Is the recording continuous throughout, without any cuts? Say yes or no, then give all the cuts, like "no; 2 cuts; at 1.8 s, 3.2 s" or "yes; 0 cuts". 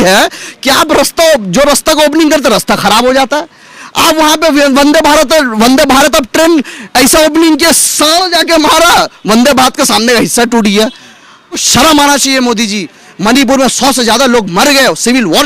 no; 1 cut; at 11.6 s